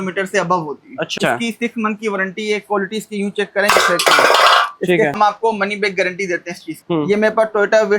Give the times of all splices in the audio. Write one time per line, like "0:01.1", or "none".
0:01.2
0:05.1
0:06.8